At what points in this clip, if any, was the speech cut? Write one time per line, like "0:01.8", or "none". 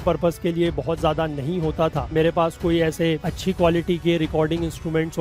0:02.1
0:03.3